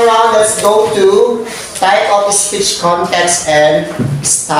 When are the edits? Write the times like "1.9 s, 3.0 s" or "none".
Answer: none